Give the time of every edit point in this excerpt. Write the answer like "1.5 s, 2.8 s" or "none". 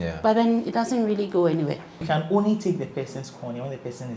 2.0 s